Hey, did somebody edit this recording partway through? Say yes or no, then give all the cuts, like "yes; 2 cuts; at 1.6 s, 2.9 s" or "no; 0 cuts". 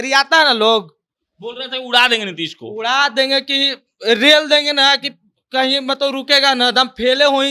no; 0 cuts